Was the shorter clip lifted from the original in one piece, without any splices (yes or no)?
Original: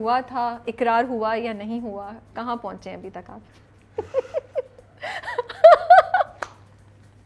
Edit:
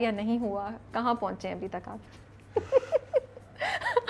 yes